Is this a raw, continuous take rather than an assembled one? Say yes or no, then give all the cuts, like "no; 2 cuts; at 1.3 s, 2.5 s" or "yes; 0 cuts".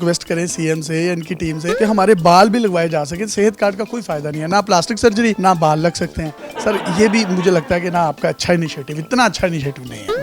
yes; 0 cuts